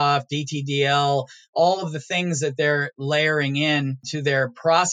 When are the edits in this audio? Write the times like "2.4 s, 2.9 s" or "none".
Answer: 4.0 s